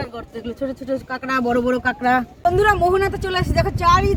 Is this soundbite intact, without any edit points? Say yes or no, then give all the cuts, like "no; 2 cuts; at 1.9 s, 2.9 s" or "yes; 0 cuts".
no; 1 cut; at 2.4 s